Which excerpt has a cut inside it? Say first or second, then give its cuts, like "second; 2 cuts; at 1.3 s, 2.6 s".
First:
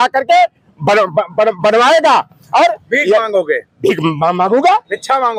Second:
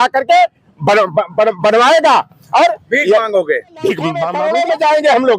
second; 1 cut; at 4.3 s